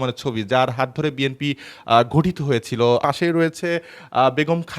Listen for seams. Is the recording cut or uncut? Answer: cut